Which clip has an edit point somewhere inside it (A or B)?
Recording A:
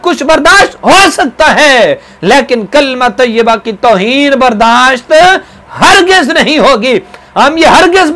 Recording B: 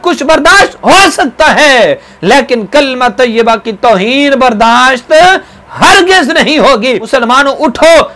B